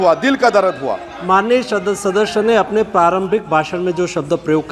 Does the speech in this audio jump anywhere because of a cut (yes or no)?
yes